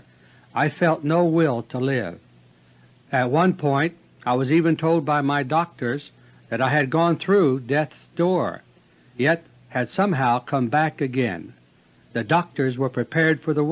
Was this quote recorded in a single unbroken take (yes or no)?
yes